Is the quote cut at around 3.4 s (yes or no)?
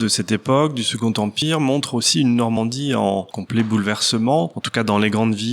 yes